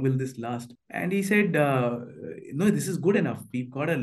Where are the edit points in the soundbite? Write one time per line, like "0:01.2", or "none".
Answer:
none

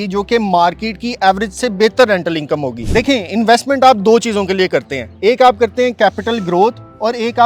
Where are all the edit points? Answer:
none

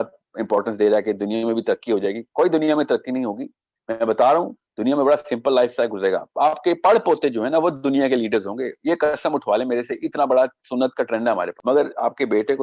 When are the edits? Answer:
0:11.5

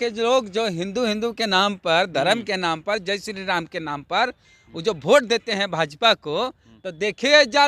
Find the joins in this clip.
none

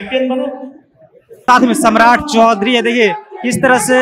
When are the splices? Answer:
0:01.4

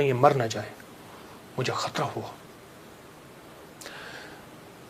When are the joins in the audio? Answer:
none

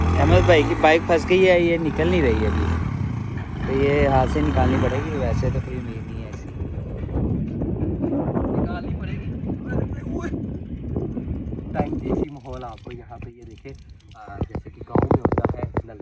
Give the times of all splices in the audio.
none

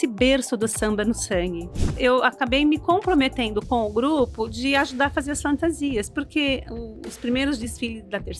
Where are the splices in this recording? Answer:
0:02.0

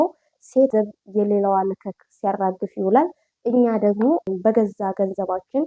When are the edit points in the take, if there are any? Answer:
0:00.7
0:04.3

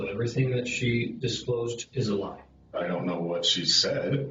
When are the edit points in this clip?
0:01.8
0:02.7

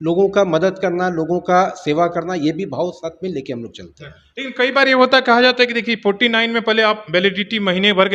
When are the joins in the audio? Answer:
none

